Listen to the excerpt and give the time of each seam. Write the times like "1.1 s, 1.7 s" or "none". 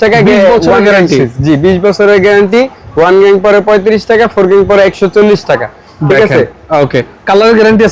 none